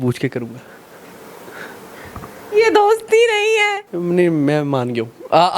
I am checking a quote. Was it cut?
yes; 1 cut; at 3.9 s

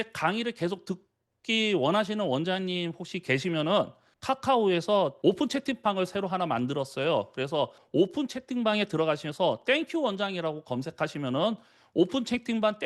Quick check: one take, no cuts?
yes; 0 cuts

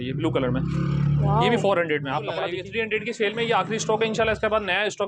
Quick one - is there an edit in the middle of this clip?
yes; 1 cut; at 2.6 s

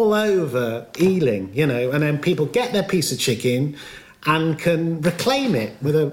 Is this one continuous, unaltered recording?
yes; 0 cuts

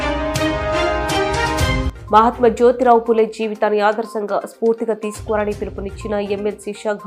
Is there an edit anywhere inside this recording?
no; 0 cuts

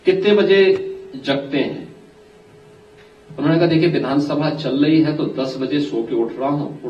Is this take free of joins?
yes; 0 cuts

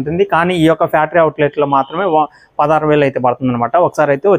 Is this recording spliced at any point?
no; 0 cuts

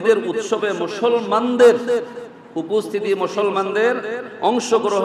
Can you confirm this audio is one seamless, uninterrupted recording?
yes; 0 cuts

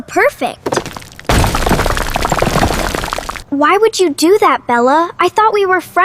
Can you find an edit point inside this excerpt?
yes; 1 cut; at 3.3 s

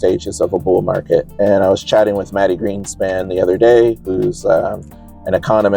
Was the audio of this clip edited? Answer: no; 0 cuts

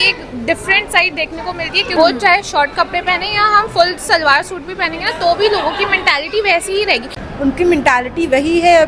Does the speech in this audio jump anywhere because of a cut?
yes; 2 cuts; at 1.9 s, 7.2 s

